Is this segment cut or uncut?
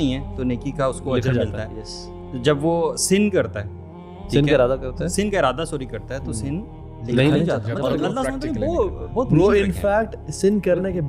uncut